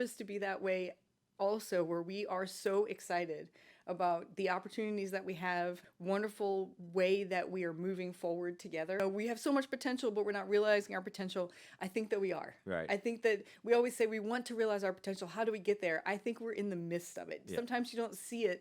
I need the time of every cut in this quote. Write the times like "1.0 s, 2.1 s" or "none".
5.9 s, 9.0 s

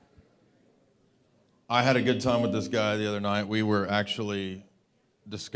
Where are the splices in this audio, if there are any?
none

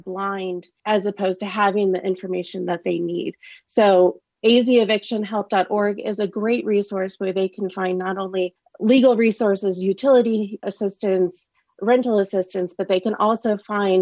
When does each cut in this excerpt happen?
none

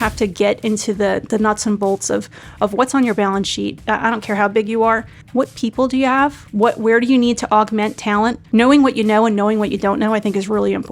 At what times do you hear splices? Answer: 3.8 s, 5.1 s, 8.4 s

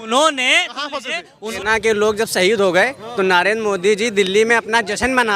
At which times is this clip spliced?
1.5 s

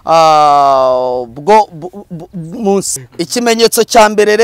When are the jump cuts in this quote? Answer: 2.9 s

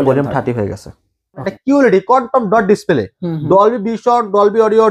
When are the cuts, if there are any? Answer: 1.2 s

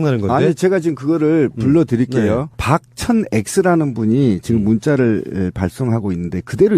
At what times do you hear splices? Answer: 3.1 s

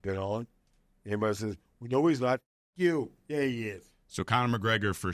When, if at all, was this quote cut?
none

